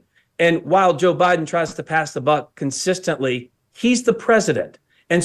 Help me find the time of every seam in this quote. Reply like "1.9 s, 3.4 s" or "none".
none